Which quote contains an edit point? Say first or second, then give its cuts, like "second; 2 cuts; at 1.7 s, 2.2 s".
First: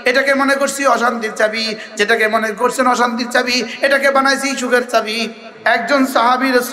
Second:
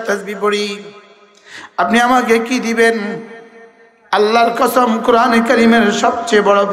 first; 1 cut; at 5.4 s